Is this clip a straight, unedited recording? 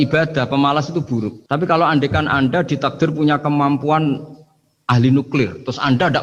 yes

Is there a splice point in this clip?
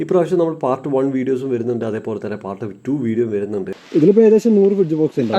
yes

